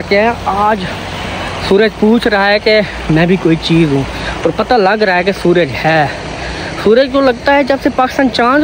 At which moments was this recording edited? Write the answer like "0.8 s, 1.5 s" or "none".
none